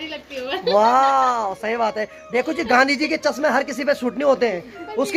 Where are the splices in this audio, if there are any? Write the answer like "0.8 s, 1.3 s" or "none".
none